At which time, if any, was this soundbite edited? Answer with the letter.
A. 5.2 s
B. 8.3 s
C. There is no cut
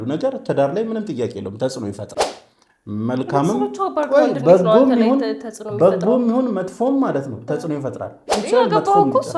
B